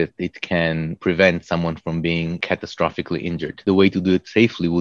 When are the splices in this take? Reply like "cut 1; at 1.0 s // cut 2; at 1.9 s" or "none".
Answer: cut 1; at 0.9 s // cut 2; at 2.4 s // cut 3; at 3.6 s